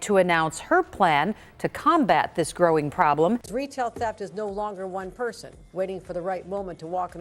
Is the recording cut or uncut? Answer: cut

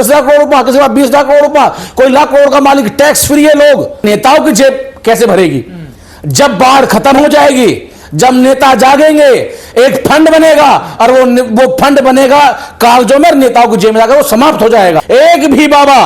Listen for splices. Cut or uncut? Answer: cut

